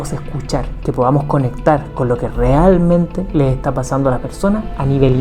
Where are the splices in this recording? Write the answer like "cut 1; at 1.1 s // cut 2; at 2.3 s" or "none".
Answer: none